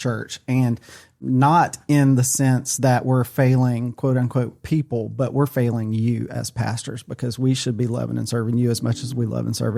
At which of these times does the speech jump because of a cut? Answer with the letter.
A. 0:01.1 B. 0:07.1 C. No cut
A